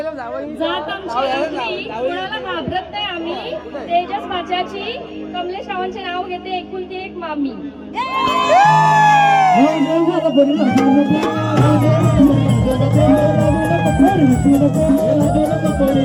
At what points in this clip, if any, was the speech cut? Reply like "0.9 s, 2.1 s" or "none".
none